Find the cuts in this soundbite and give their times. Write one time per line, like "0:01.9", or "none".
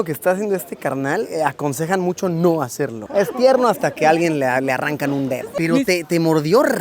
0:03.0
0:05.5